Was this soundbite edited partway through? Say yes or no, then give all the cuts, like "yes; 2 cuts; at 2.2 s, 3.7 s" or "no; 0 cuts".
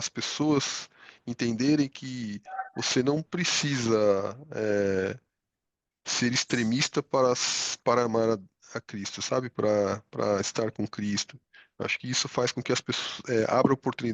no; 0 cuts